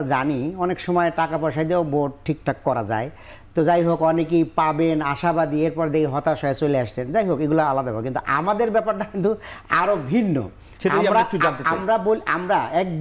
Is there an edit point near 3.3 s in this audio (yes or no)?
no